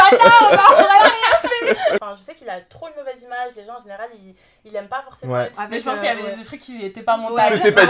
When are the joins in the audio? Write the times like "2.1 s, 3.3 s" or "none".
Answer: 2.0 s, 5.5 s